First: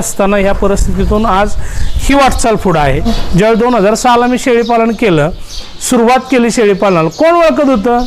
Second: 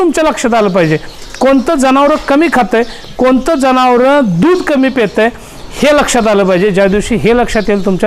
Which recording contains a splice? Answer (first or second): first